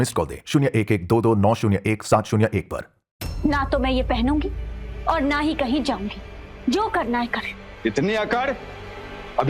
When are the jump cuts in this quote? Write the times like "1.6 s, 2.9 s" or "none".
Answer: 3.1 s